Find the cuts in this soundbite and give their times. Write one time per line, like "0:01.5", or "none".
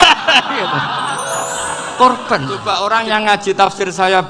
0:02.6